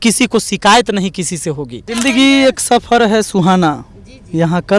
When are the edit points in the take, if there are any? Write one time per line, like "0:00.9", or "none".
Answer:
0:01.8